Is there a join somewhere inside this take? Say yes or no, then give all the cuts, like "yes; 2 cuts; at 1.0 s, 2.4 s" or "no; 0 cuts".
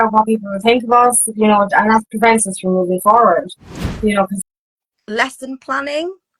yes; 1 cut; at 4.5 s